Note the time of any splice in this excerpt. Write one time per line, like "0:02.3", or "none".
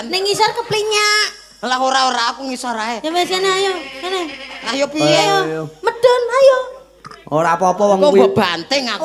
none